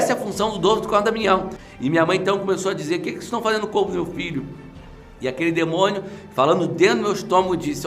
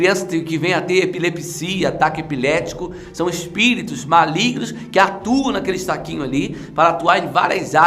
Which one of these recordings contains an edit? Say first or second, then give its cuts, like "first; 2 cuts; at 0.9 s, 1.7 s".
first; 1 cut; at 1.6 s